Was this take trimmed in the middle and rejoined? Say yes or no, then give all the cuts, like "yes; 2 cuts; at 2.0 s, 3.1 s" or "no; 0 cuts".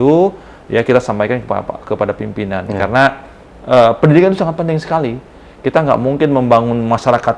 no; 0 cuts